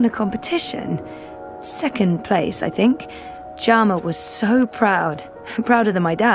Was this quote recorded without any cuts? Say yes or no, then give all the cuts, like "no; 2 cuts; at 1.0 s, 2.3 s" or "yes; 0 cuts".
yes; 0 cuts